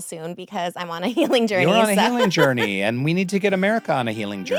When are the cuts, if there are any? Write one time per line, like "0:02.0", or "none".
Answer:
none